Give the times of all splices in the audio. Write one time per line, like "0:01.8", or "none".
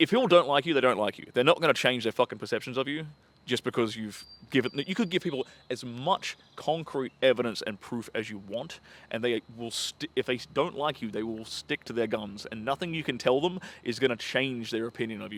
none

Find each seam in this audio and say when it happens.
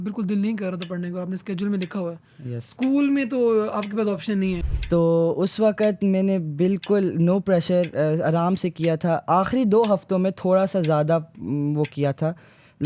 0:04.6

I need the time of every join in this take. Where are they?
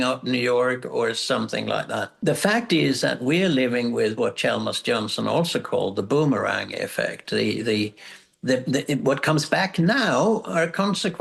0:02.1

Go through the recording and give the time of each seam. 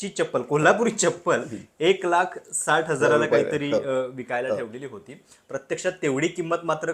none

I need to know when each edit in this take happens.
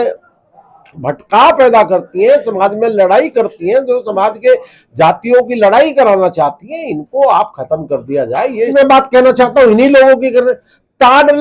0:08.7

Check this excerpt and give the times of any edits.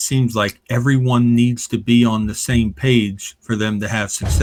none

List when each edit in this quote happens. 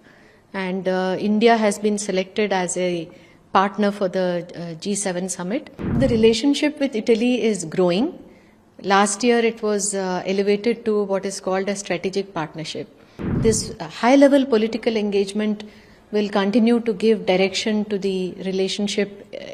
0:06.0
0:13.4

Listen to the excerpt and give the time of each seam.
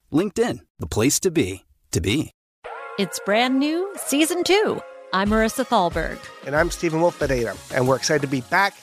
0:02.4

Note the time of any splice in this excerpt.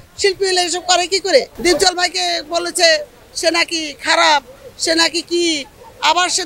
0:01.5

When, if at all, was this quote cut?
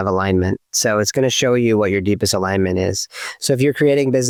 none

